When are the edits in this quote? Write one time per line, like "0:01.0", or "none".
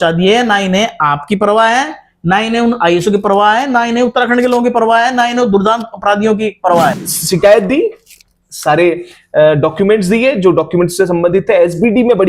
0:07.1